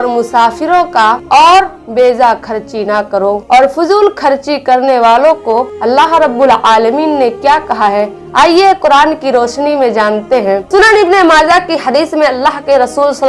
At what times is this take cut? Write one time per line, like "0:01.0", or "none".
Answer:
0:10.7